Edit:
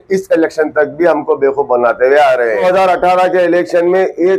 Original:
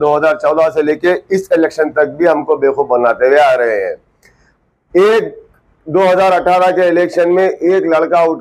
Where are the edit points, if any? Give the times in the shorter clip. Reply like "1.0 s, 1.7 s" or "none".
2.6 s